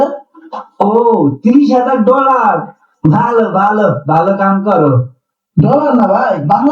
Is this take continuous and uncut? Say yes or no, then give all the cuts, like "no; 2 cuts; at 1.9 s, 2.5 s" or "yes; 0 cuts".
yes; 0 cuts